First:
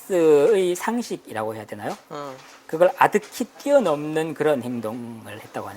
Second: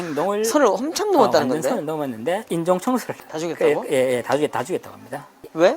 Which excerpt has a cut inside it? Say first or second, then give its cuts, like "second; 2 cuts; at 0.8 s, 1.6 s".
second; 1 cut; at 3.2 s